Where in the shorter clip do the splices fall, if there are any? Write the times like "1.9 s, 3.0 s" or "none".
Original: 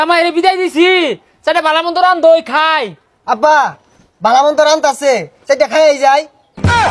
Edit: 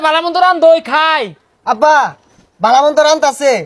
none